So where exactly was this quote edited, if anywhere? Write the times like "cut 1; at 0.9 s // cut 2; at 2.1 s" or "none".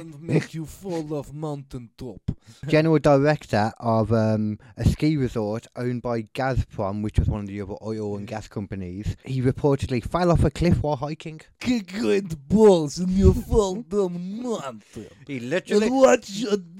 cut 1; at 2.5 s // cut 2; at 9.2 s // cut 3; at 11.5 s